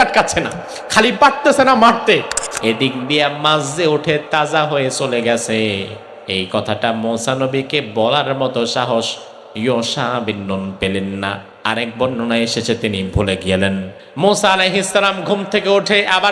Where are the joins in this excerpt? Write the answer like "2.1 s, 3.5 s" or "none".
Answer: 2.4 s, 11.5 s, 14.0 s